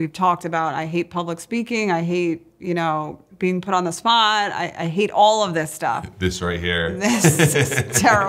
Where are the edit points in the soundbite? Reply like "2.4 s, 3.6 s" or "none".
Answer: none